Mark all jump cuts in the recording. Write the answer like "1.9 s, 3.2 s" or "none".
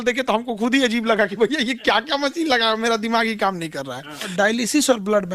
4.2 s